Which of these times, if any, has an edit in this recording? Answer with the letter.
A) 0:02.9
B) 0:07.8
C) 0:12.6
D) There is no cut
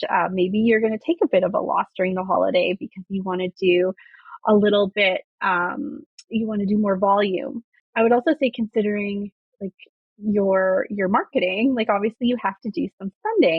B